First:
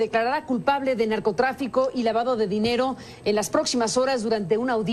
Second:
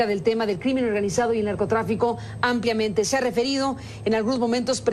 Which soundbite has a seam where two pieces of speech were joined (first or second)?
second